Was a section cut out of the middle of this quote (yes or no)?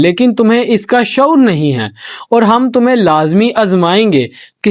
yes